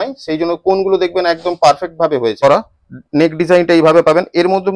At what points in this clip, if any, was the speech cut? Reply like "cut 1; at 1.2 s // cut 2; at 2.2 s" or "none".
cut 1; at 2.4 s